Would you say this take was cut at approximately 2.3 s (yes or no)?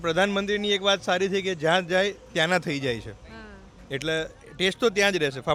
no